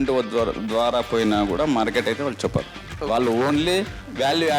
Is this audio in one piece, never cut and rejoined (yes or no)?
no